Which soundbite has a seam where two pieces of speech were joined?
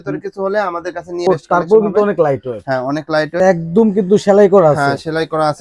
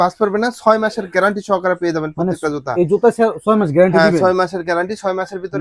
first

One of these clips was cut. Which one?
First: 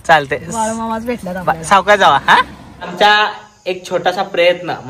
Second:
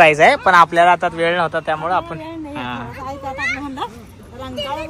first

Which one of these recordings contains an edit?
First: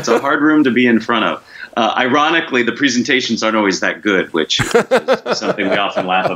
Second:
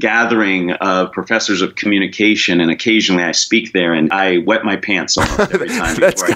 second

